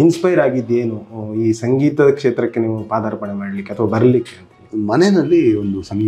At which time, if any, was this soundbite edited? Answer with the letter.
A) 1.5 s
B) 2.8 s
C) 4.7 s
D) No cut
C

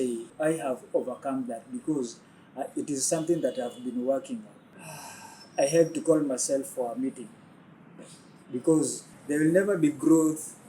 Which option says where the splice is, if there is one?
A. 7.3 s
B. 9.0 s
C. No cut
B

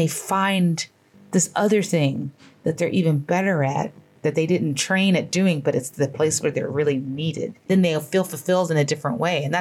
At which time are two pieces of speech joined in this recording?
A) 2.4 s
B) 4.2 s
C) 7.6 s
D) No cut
C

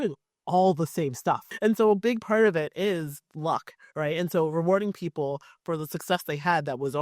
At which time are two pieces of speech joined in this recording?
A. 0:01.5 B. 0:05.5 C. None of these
A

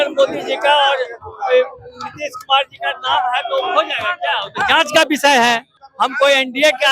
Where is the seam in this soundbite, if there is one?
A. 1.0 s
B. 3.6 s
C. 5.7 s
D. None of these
C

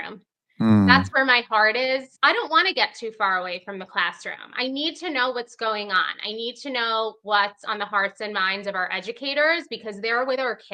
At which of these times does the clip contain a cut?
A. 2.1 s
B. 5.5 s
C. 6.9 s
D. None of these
A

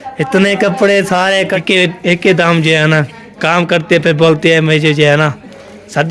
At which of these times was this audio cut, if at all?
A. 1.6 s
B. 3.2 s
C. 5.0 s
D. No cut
A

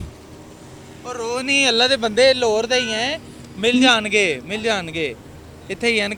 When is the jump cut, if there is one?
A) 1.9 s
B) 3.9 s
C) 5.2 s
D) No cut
D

